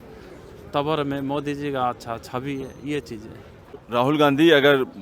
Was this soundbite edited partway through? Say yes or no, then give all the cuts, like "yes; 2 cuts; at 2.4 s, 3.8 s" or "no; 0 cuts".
yes; 1 cut; at 3.8 s